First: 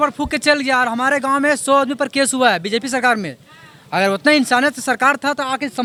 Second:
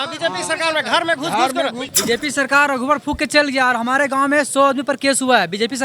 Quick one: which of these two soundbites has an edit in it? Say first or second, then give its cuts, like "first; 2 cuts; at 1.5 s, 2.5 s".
second; 1 cut; at 1.8 s